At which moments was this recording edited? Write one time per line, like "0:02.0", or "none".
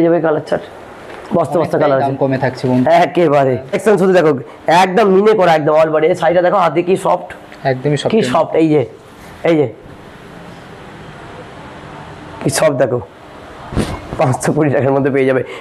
0:03.8